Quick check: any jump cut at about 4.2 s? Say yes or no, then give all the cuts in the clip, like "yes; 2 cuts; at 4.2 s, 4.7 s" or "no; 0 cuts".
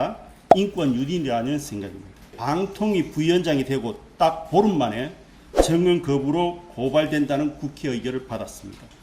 no; 1 cut; at 2.3 s